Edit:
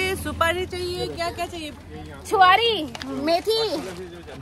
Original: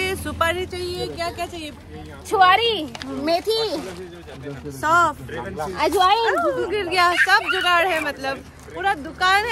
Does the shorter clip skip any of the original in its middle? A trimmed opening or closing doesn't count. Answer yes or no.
no